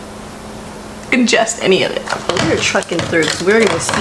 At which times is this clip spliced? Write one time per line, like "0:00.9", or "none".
0:02.3